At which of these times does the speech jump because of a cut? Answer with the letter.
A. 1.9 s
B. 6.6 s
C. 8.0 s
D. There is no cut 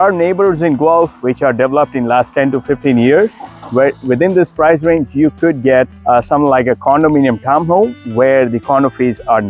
D